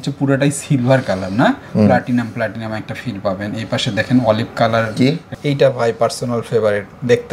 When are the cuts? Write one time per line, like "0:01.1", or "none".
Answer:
0:05.3